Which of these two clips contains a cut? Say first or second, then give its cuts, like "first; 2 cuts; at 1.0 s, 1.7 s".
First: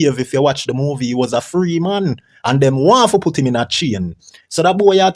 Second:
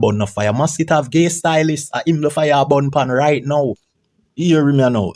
second; 1 cut; at 3.9 s